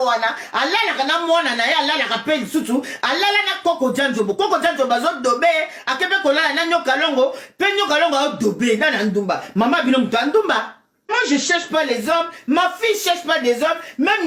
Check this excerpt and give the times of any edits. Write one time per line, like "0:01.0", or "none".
0:11.1

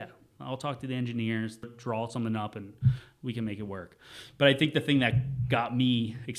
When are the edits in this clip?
0:01.6

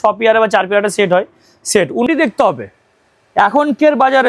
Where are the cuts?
0:02.1

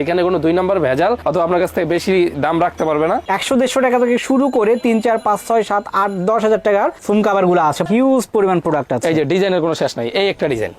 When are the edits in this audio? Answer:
0:03.3
0:07.9

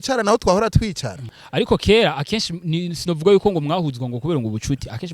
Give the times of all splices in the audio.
0:01.4

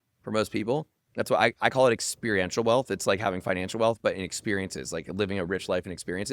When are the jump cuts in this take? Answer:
0:01.0

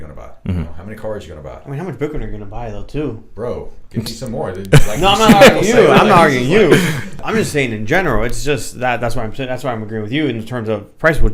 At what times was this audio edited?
0:07.2

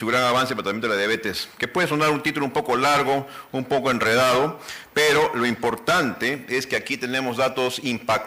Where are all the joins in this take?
0:05.2

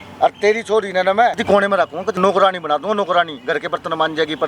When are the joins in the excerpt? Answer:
0:01.6

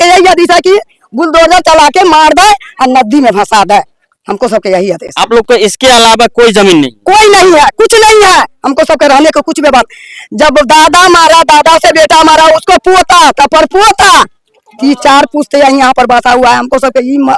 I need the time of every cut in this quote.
none

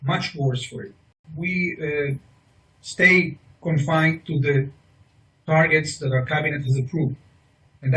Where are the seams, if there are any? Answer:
0:01.2

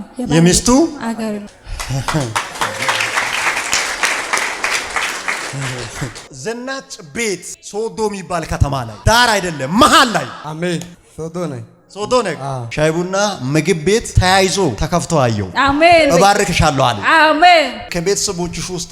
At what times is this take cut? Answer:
0:06.2
0:12.7
0:17.8

